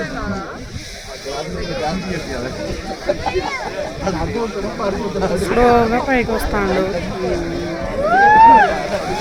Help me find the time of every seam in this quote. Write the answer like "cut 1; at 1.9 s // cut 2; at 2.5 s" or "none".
none